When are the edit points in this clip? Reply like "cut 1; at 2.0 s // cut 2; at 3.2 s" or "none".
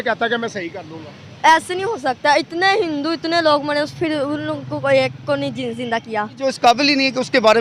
cut 1; at 6.4 s